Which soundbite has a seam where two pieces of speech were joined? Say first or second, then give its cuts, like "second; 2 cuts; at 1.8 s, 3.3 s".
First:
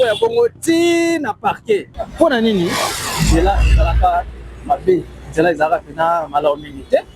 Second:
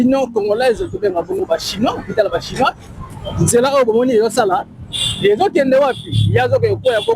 first; 1 cut; at 2.0 s